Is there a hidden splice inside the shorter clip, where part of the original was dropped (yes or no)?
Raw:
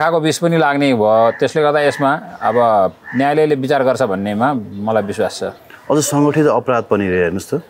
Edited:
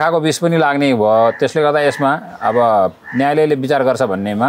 no